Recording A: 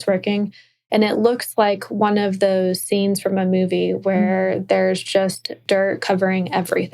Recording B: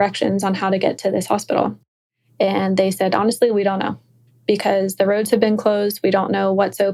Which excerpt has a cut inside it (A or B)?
A